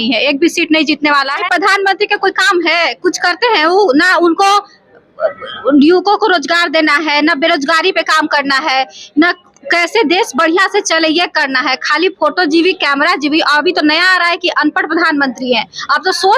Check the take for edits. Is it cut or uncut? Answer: cut